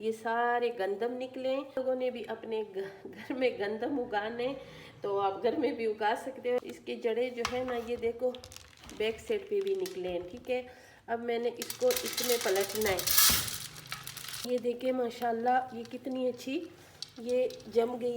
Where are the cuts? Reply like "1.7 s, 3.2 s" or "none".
1.7 s, 6.6 s, 14.5 s